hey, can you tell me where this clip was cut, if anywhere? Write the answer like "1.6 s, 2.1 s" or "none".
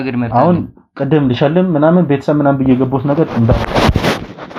none

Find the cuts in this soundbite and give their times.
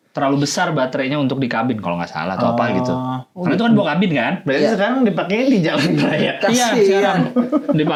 none

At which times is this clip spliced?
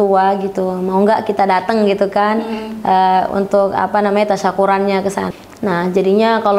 5.3 s

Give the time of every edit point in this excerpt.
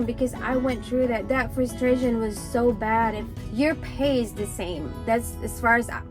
3.4 s

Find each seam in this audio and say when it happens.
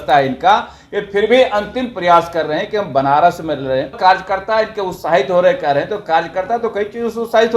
3.9 s

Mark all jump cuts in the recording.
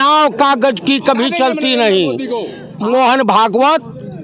2.6 s

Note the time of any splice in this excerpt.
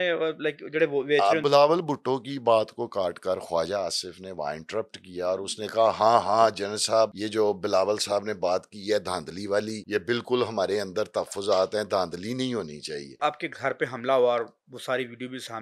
1.4 s, 7.2 s, 9.8 s, 13.2 s

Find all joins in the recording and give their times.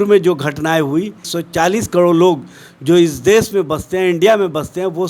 1.3 s

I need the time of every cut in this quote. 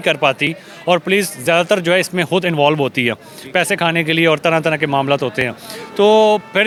none

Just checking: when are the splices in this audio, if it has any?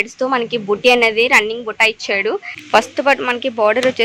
2.5 s

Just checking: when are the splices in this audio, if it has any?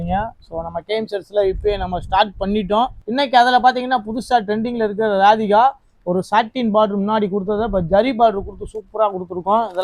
3.0 s

